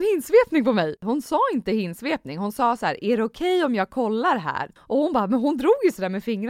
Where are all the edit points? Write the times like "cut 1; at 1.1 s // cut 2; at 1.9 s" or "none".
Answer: cut 1; at 1.0 s // cut 2; at 4.7 s